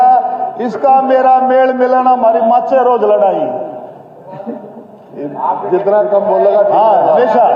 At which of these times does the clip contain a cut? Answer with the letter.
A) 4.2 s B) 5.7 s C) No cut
C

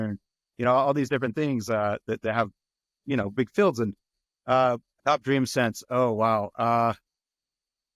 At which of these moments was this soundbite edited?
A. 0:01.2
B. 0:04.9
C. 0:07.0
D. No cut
B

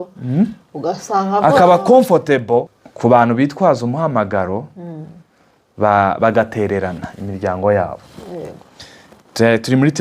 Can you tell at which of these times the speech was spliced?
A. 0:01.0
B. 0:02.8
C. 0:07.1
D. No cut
B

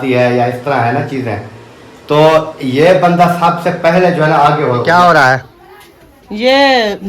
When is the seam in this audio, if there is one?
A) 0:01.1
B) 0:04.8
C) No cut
B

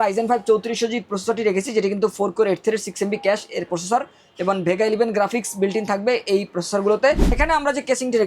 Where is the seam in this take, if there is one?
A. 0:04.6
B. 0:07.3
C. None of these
B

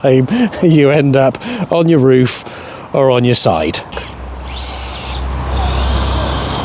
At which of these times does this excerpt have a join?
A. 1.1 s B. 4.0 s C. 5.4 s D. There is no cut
B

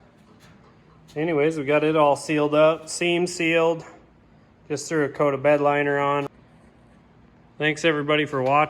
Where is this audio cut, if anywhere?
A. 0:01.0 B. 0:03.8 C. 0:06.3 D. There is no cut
C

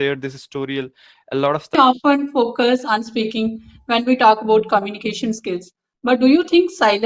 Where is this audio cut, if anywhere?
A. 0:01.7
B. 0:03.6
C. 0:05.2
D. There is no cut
A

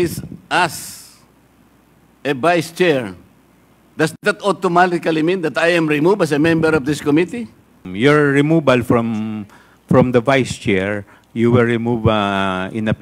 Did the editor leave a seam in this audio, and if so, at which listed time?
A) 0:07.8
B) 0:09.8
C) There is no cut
A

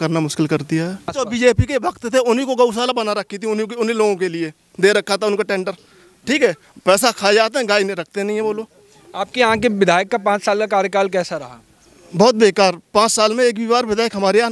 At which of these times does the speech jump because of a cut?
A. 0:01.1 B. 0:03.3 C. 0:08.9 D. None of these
A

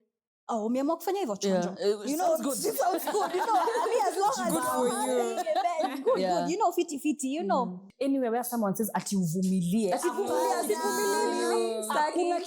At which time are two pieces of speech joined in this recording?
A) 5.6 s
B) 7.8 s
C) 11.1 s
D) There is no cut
B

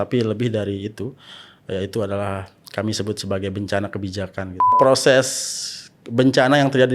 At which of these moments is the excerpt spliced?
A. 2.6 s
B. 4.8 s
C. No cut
B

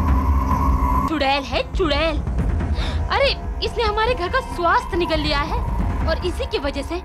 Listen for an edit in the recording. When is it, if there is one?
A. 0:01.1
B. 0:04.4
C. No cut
A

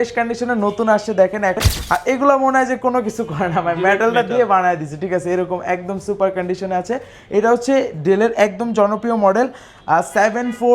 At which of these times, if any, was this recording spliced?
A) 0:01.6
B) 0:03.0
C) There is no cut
A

